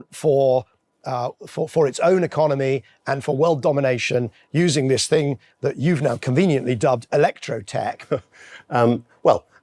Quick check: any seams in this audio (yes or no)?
yes